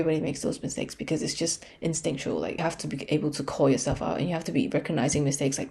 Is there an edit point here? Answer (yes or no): yes